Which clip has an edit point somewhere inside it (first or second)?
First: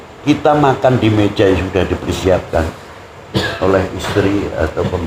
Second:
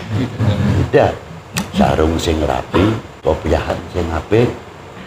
second